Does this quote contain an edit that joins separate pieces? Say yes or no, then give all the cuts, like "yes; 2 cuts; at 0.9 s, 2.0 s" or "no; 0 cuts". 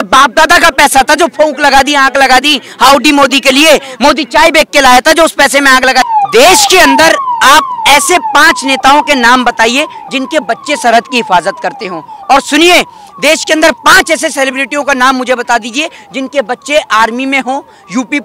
yes; 1 cut; at 6.1 s